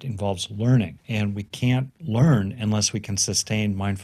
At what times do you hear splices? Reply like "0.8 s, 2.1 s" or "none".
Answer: 1.0 s, 1.9 s